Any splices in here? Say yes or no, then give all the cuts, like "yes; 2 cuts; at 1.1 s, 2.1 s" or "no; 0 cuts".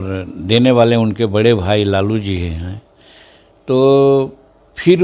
no; 0 cuts